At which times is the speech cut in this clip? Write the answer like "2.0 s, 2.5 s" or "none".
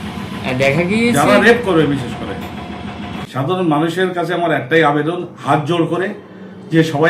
3.1 s